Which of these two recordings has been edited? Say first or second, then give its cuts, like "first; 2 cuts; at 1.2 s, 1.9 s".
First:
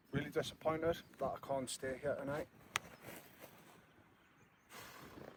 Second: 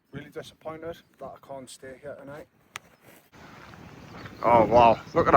second; 1 cut; at 3.3 s